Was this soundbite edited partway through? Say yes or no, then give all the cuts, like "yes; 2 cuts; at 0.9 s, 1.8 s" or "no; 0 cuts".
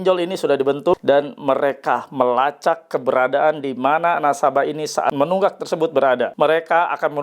yes; 3 cuts; at 0.9 s, 5.1 s, 6.3 s